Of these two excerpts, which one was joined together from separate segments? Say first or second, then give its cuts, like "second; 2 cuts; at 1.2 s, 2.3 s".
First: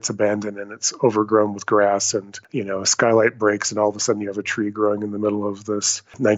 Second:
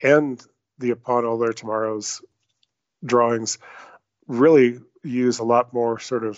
first; 1 cut; at 2.4 s